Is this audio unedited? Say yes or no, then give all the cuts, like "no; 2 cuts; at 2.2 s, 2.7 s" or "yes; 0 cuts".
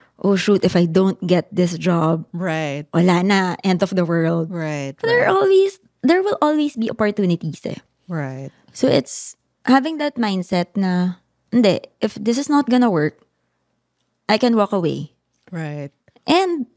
yes; 0 cuts